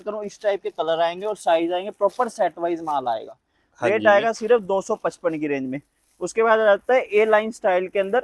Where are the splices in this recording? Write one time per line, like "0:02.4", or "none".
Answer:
none

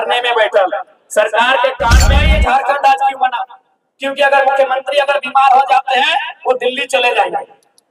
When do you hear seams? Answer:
0:02.3

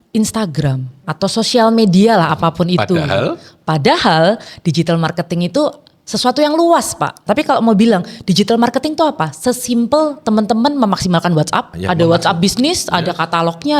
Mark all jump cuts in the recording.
0:01.0
0:07.2
0:11.7

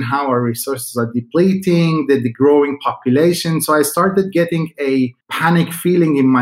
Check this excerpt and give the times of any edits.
0:05.2

